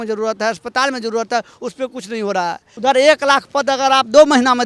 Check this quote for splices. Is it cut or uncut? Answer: cut